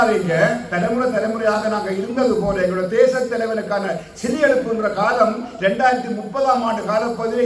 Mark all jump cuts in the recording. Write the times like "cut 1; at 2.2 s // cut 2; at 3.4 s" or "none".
none